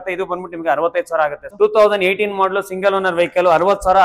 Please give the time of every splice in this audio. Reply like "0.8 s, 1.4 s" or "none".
1.4 s